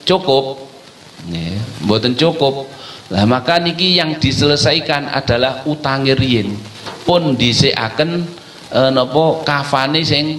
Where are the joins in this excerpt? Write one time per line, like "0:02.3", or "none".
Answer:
none